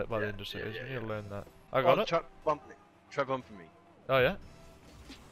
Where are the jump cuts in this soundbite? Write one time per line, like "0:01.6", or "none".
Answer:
0:01.5